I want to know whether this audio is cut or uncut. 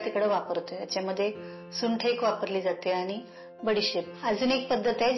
cut